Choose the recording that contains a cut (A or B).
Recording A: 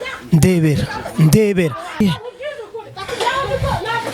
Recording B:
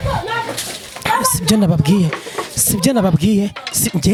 A